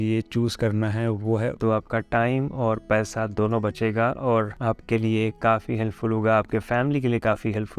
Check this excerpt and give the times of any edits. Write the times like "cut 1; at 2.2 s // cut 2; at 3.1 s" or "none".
cut 1; at 1.6 s